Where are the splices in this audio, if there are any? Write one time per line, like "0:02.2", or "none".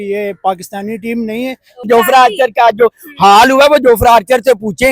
0:01.9